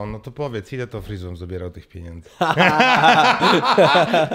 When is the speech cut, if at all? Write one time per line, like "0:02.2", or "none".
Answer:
none